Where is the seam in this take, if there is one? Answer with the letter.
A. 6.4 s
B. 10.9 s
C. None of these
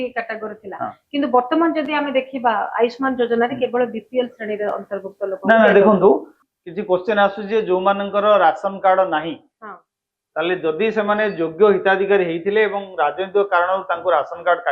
A